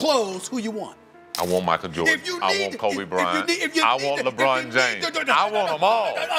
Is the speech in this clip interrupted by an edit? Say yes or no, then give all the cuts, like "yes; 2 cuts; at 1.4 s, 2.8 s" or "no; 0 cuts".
no; 0 cuts